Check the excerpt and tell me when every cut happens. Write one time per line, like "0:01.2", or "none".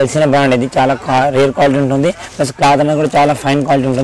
none